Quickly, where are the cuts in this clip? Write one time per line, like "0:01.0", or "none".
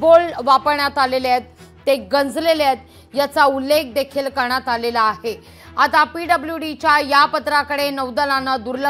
none

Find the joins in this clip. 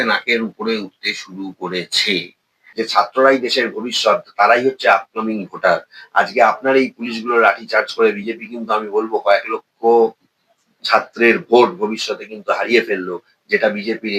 0:02.6

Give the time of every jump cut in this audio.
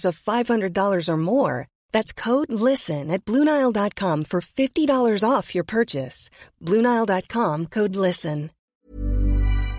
0:08.6

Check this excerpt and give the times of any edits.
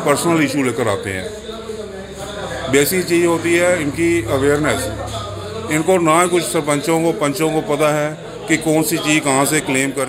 none

